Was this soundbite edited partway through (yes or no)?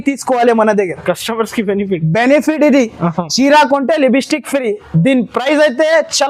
no